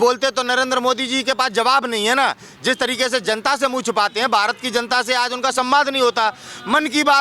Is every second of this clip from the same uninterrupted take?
yes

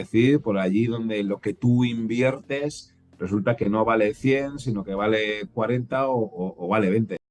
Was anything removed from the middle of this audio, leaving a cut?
no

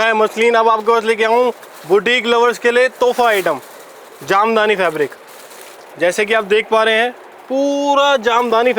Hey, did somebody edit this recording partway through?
no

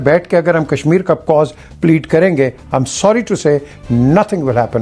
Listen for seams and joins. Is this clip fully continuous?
yes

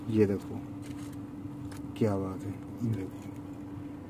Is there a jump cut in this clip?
yes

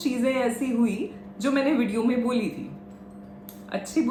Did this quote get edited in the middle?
no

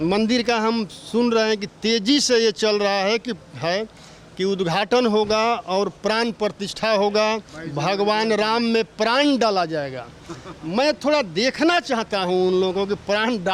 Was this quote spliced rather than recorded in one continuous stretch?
no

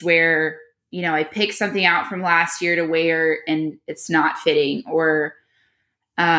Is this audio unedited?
yes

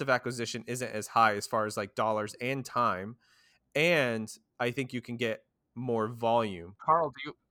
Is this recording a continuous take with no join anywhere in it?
yes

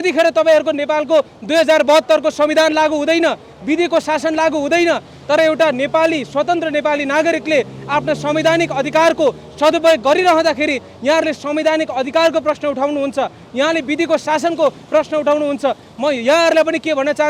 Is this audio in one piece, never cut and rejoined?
yes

